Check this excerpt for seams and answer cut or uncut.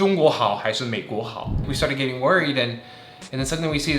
cut